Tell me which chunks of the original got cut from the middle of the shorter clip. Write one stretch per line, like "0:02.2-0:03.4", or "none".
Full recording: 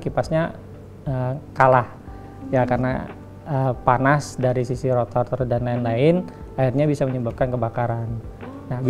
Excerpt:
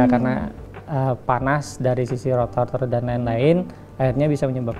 none